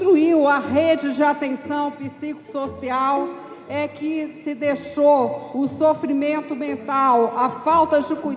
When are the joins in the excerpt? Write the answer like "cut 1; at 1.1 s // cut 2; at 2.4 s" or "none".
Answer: none